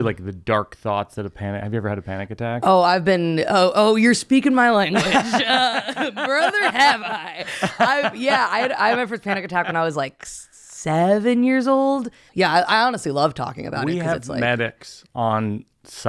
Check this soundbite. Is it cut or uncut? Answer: cut